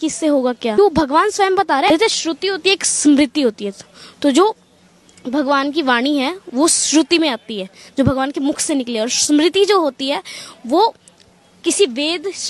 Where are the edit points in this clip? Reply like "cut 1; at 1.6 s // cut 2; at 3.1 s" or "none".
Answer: cut 1; at 0.8 s // cut 2; at 1.9 s